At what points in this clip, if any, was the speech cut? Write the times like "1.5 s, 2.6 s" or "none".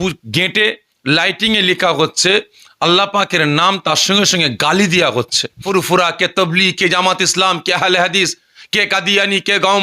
5.6 s